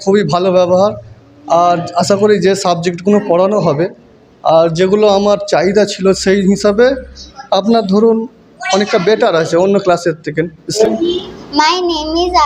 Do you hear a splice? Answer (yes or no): yes